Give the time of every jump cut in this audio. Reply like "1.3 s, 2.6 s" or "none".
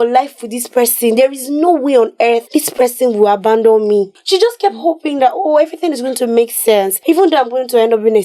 2.4 s, 4.2 s, 6.9 s

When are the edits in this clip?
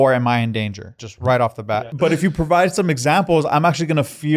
1.8 s

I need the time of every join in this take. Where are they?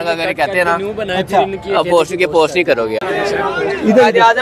3.0 s

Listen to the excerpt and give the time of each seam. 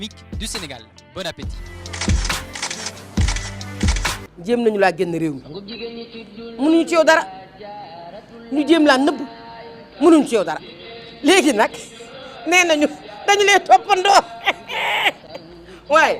4.3 s

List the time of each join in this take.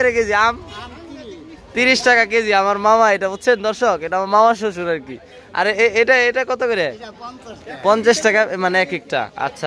none

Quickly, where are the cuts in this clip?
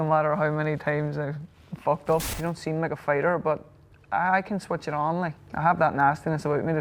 2.3 s, 5.4 s

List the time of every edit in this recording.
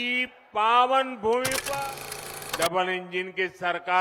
1.9 s

